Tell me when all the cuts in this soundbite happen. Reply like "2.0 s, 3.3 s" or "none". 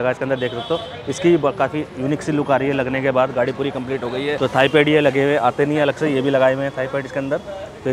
none

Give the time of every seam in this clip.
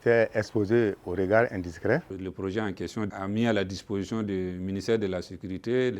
2.1 s

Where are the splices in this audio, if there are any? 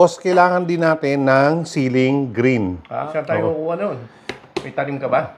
3.1 s

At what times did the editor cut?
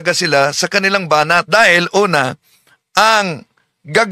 1.5 s

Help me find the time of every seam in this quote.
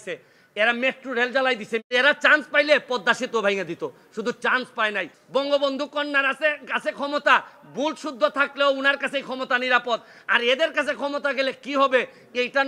1.9 s, 5.1 s

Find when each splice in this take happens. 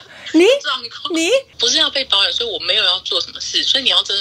1.6 s

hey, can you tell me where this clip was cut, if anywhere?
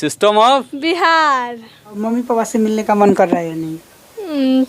1.9 s

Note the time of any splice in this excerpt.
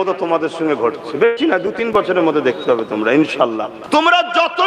3.7 s

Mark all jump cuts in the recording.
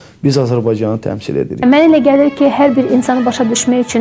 1.6 s

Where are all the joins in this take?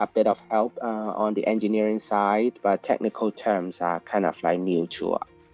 2.8 s

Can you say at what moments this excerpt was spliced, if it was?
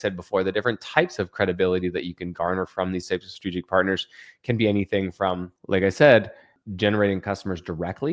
5.5 s, 6.5 s

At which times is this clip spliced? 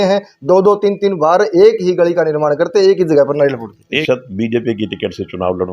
3.9 s

